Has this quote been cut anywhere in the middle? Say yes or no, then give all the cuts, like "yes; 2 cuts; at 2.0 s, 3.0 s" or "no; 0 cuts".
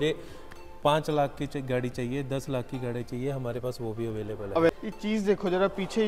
yes; 1 cut; at 4.7 s